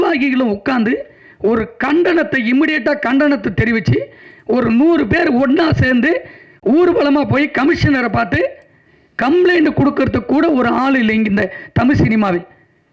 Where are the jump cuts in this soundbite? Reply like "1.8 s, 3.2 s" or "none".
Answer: none